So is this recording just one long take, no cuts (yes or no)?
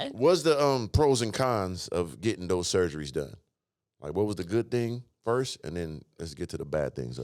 yes